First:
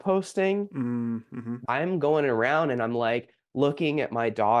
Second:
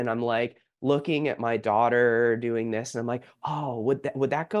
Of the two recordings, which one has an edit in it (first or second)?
first